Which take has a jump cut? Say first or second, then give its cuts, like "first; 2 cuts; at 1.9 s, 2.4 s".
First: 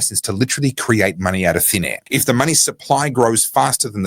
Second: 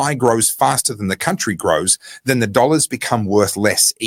first; 1 cut; at 2.0 s